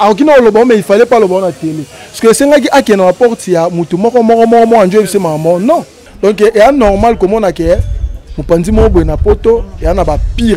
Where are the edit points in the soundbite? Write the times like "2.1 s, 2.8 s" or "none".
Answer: 6.0 s